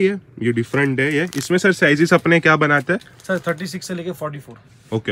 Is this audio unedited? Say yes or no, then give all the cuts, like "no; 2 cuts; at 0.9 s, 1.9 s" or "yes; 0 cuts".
yes; 0 cuts